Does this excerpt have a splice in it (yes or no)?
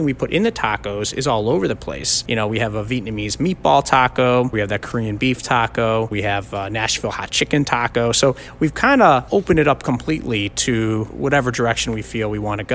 yes